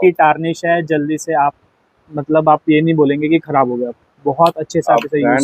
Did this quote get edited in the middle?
no; 0 cuts

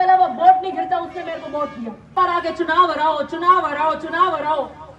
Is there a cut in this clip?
yes; 1 cut; at 2.1 s

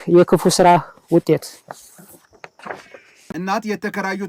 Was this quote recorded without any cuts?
no; 1 cut; at 3.3 s

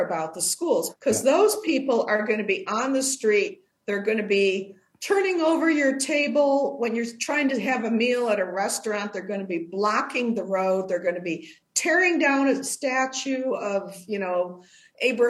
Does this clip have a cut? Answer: yes; 1 cut; at 0.9 s

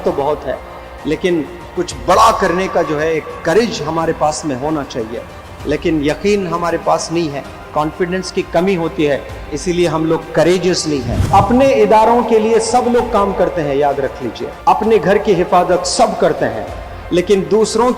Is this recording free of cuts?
no; 2 cuts; at 11.2 s, 14.5 s

